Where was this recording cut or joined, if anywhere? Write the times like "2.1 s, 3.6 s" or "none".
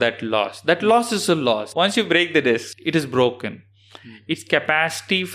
1.7 s, 2.7 s